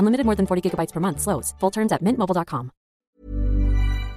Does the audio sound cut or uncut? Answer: cut